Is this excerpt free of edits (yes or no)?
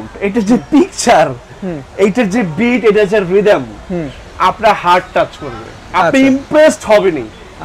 yes